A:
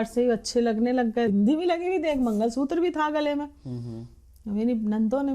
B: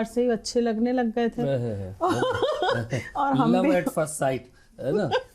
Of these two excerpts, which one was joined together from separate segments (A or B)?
A